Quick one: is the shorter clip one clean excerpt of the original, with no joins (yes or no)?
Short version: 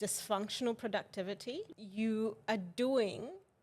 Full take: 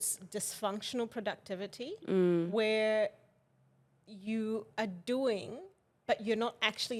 no